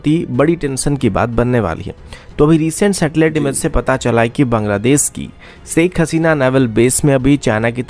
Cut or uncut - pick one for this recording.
uncut